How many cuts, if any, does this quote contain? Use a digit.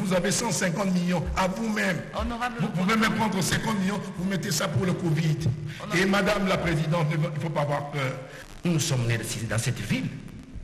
1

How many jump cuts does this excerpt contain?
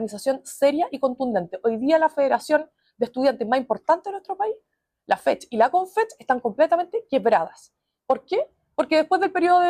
0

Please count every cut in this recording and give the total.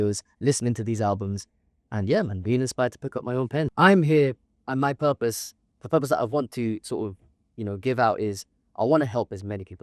1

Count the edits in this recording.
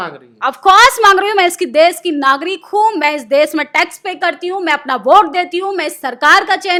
0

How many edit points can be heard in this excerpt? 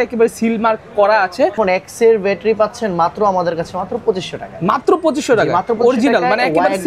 1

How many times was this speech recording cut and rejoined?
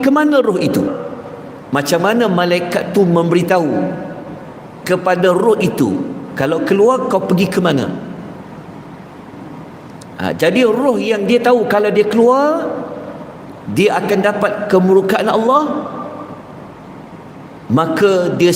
1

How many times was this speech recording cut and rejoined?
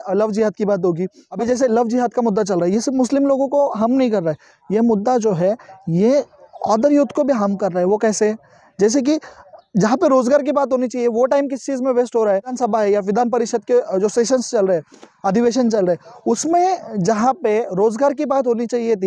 2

